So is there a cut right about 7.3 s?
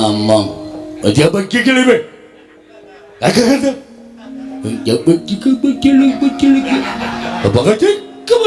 yes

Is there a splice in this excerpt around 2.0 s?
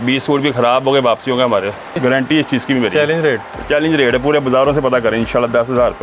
yes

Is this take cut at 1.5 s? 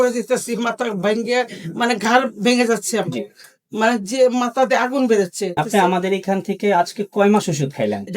no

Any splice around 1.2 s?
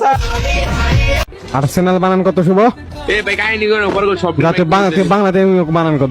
yes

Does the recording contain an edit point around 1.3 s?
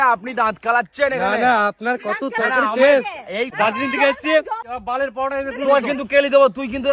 no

